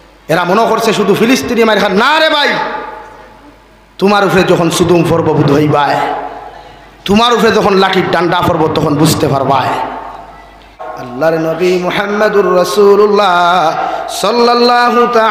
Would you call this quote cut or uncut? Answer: cut